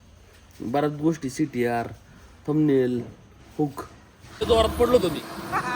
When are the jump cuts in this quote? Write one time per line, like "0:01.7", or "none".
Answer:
0:04.4